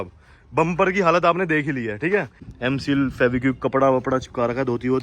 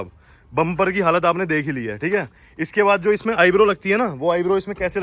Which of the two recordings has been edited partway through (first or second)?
first